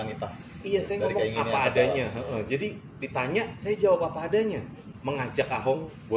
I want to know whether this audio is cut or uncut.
cut